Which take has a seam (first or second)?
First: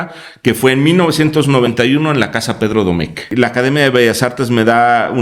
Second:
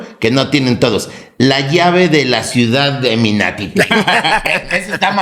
first